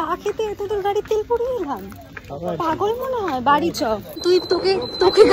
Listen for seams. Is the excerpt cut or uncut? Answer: cut